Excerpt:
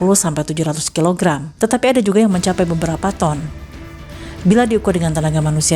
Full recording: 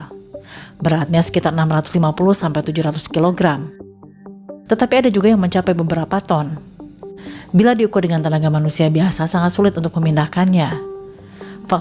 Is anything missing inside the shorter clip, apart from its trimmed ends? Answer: yes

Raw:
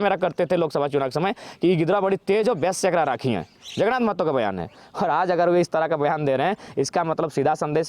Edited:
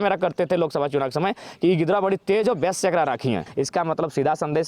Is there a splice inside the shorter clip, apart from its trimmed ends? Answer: yes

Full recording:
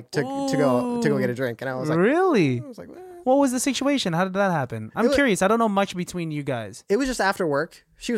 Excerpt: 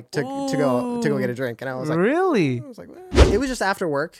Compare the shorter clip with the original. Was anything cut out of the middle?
yes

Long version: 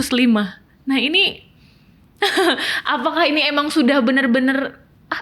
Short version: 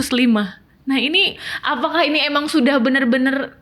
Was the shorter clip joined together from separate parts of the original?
yes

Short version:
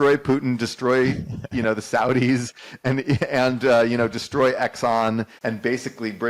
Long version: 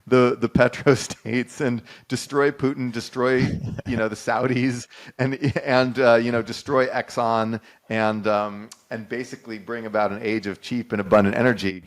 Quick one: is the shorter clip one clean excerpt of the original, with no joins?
no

